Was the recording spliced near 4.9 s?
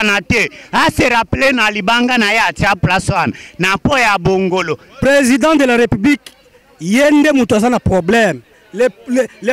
yes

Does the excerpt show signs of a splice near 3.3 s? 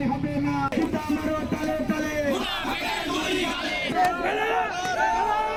no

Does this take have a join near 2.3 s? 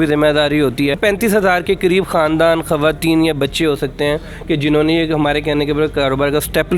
no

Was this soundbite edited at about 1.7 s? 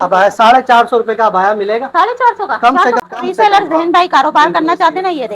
no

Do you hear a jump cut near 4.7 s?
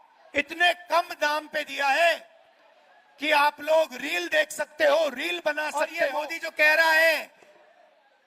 no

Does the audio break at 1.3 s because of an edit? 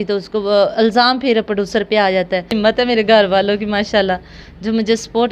no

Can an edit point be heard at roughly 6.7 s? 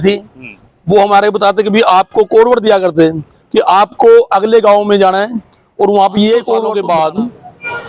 yes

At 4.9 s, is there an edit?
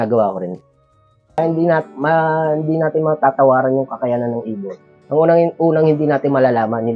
no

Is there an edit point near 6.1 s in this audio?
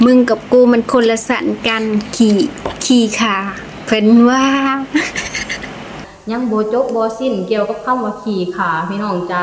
yes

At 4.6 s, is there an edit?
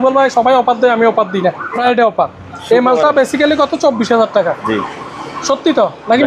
no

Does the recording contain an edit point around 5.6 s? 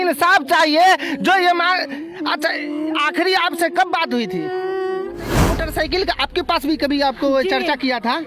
yes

